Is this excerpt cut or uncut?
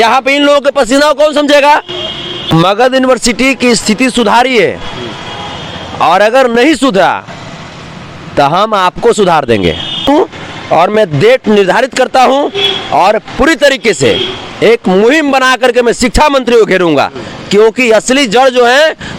cut